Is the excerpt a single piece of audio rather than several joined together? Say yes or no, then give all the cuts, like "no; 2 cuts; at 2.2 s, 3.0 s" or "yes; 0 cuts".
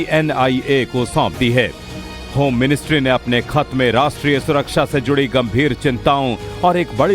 no; 1 cut; at 4.5 s